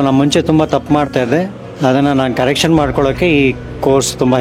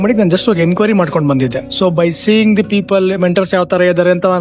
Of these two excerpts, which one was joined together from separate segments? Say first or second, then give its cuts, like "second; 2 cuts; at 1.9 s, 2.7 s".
second; 1 cut; at 1.6 s